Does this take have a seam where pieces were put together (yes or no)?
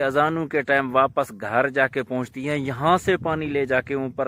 no